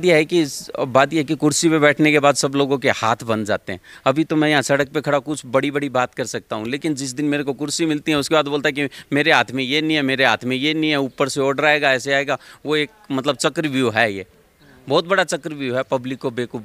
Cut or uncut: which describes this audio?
uncut